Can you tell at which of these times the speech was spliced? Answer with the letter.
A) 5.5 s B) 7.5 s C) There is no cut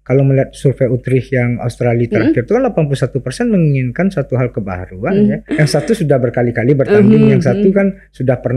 A